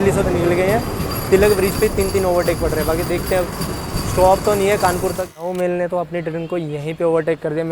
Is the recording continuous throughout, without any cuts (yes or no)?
no